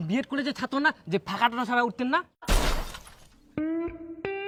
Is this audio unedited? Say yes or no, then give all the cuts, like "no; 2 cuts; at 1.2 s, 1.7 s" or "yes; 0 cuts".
yes; 0 cuts